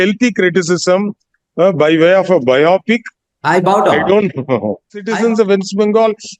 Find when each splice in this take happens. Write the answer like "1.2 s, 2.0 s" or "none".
5.1 s